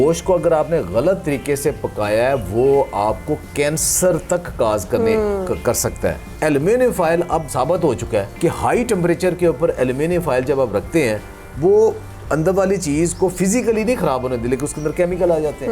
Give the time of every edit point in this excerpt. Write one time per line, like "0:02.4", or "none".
0:06.3
0:07.5
0:08.3